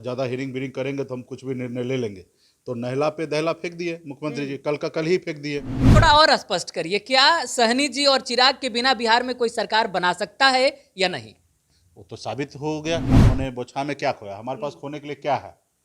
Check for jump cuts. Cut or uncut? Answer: cut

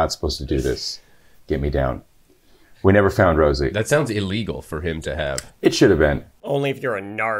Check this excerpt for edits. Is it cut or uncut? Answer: cut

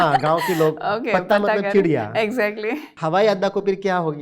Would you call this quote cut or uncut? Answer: cut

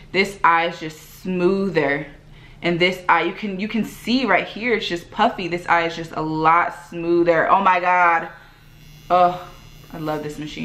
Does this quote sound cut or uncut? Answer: uncut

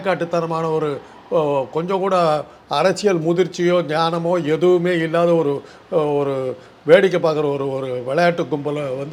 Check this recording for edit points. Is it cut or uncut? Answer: uncut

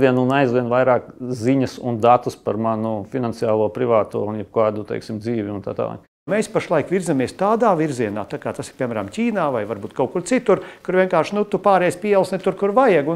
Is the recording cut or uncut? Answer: cut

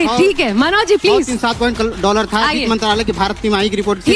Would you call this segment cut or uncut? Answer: uncut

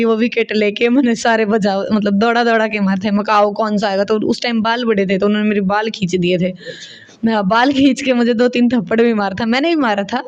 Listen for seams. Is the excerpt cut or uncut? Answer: uncut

